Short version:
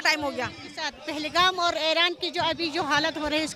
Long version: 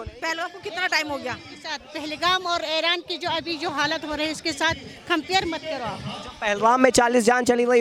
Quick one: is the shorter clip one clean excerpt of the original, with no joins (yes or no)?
yes